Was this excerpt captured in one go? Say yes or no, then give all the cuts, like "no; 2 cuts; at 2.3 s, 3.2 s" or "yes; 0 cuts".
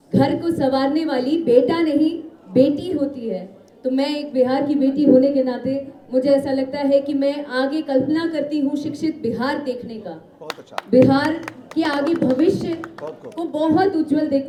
yes; 0 cuts